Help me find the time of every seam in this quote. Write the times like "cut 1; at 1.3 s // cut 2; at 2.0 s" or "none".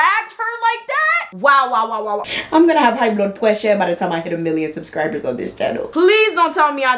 cut 1; at 2.2 s // cut 2; at 5.9 s